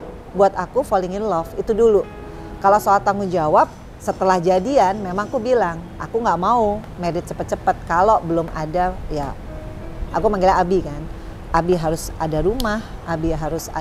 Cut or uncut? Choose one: uncut